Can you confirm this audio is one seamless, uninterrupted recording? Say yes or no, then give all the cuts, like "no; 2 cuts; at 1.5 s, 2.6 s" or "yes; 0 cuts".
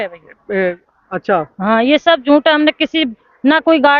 yes; 0 cuts